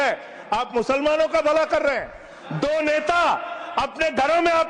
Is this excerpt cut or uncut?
uncut